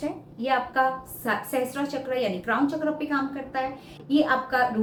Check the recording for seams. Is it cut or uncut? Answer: uncut